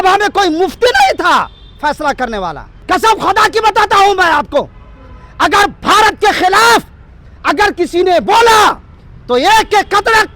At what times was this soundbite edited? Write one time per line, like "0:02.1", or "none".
0:02.8